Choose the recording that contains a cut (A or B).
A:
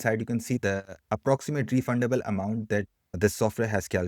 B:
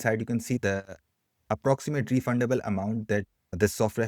A